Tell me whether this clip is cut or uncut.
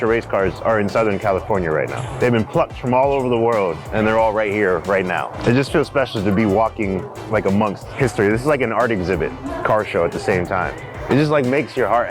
cut